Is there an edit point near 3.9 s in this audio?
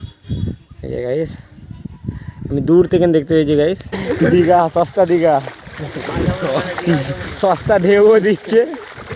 yes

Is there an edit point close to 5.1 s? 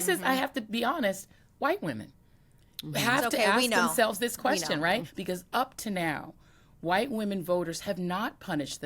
yes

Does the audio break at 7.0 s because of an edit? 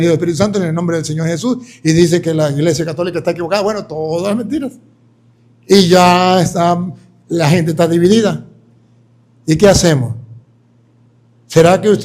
no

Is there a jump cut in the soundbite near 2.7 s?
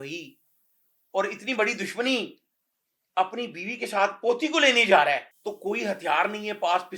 no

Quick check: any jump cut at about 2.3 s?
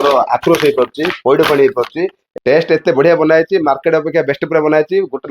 yes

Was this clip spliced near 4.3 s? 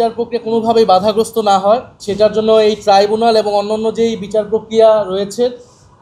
no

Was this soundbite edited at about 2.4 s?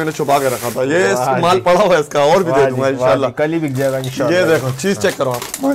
no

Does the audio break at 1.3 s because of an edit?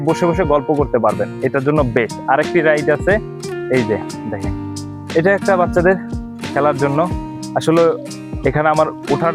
no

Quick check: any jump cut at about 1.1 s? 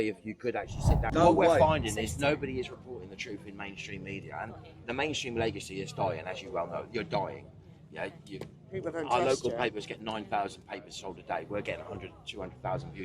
yes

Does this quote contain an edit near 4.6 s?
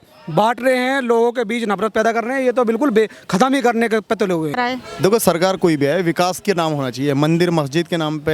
yes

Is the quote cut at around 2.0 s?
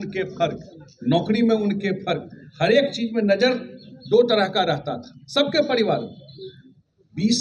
no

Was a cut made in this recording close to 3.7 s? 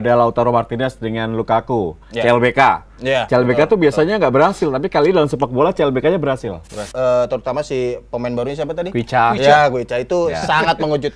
no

